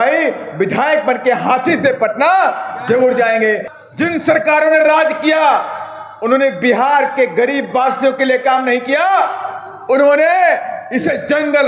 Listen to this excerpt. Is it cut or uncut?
cut